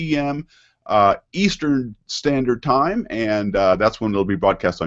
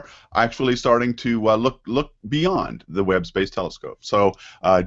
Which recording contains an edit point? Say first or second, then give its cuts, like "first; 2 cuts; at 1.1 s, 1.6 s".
second; 1 cut; at 3.2 s